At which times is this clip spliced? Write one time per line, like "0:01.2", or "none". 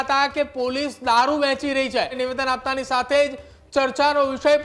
0:02.2